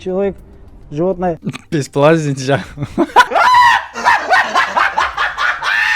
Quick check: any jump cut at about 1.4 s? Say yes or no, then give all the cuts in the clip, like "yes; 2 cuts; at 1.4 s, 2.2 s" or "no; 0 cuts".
no; 0 cuts